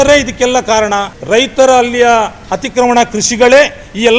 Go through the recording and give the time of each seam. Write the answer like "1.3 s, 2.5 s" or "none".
1.1 s